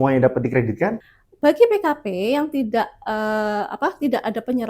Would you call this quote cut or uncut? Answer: cut